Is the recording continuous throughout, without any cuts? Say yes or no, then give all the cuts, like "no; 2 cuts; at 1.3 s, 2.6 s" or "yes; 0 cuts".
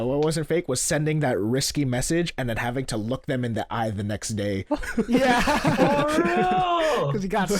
yes; 0 cuts